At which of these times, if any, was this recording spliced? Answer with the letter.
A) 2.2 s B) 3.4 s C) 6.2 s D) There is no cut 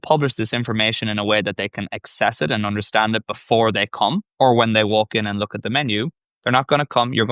C